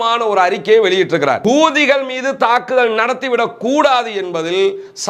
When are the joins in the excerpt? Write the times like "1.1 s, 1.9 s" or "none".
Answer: 1.4 s